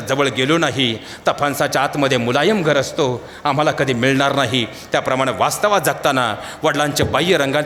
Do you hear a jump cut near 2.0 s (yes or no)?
no